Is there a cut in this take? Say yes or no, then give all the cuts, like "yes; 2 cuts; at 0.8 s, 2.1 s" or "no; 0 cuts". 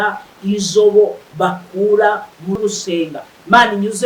yes; 1 cut; at 2.6 s